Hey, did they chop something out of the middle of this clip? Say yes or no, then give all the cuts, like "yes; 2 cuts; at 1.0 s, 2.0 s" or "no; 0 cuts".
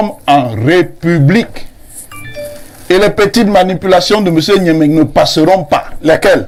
no; 0 cuts